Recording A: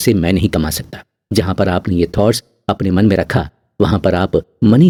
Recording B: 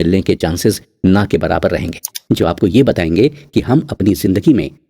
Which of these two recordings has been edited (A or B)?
B